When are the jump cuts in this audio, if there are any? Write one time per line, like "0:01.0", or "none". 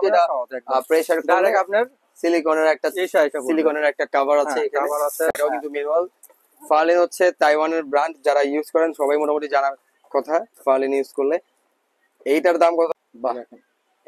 0:05.3
0:12.9